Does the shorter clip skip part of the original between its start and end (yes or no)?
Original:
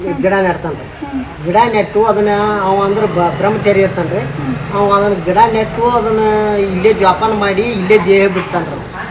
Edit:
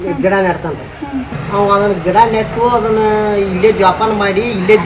yes